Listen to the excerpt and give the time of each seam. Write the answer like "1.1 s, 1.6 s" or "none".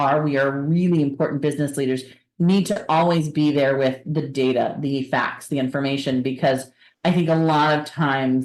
none

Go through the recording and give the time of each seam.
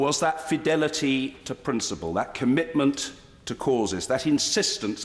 none

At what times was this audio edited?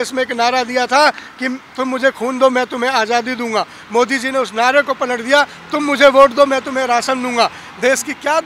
none

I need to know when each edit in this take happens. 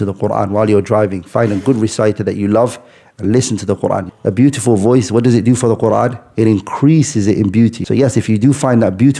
4.1 s, 7.8 s

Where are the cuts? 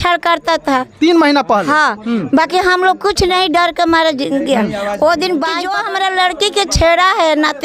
5.8 s

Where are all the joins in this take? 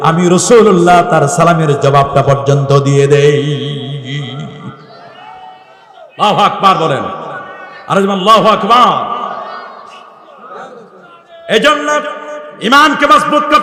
none

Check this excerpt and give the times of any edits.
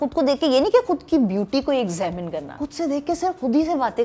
2.5 s

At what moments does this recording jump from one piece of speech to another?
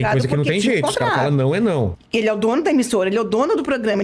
2.0 s

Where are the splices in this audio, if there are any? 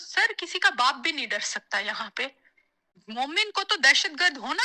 3.0 s

